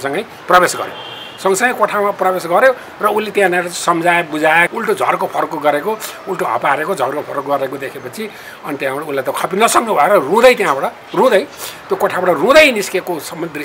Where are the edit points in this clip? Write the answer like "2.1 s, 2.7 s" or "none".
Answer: 4.7 s